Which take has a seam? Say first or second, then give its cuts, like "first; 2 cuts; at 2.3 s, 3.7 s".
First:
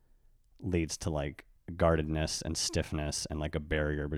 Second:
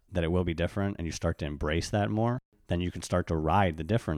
second; 1 cut; at 2.5 s